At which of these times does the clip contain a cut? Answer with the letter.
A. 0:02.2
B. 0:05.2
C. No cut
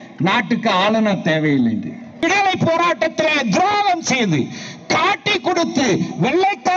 A